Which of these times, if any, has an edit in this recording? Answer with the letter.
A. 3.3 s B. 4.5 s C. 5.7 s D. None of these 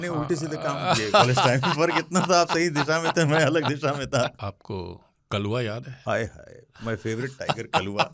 B